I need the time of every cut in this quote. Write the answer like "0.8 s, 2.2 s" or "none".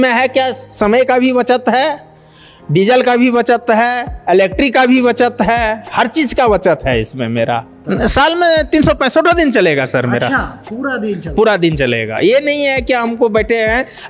7.8 s